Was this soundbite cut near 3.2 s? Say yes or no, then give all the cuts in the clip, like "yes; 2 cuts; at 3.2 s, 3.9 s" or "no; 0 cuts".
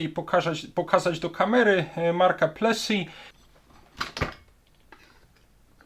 yes; 1 cut; at 3.2 s